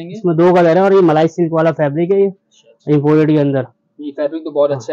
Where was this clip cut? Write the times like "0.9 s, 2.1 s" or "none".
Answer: none